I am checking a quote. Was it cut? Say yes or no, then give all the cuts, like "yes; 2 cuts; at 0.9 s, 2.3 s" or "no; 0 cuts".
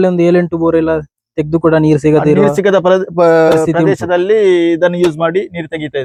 no; 0 cuts